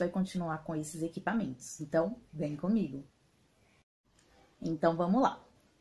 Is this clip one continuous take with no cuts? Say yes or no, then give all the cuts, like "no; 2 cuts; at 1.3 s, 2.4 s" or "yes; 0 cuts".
no; 1 cut; at 4.0 s